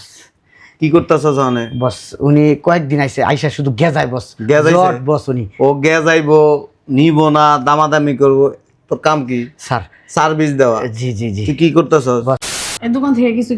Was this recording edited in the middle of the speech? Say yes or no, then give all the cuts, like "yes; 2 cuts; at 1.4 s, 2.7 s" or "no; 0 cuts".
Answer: yes; 1 cut; at 12.5 s